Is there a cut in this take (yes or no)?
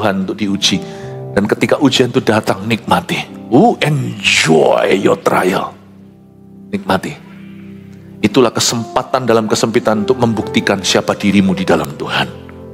no